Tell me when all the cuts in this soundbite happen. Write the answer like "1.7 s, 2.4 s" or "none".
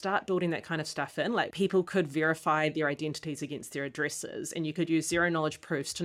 1.5 s

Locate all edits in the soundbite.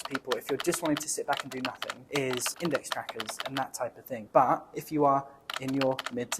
1.9 s

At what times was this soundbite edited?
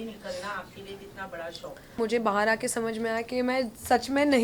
2.0 s

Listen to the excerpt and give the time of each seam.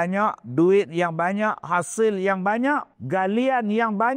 2.9 s

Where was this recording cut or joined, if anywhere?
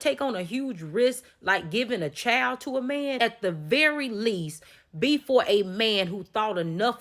3.1 s

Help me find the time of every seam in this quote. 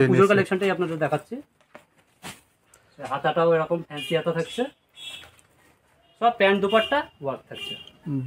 none

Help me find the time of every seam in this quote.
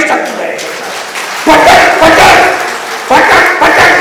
none

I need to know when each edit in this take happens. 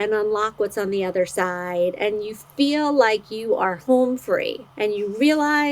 4.6 s

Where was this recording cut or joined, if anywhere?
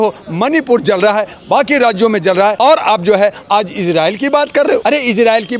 2.6 s, 4.8 s

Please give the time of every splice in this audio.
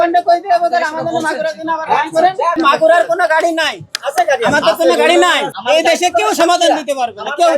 2.6 s, 5.5 s

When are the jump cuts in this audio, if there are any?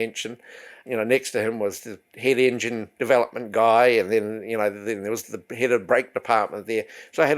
0.8 s, 2.9 s

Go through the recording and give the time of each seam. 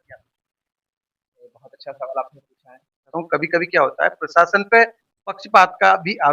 3.1 s

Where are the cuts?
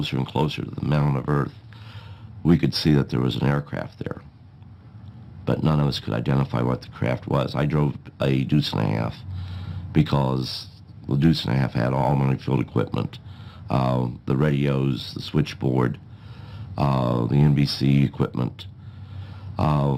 none

